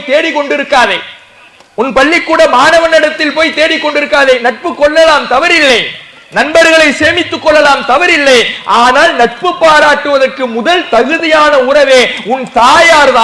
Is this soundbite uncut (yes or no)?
yes